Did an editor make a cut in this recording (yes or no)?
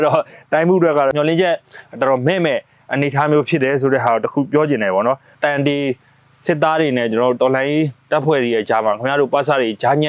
yes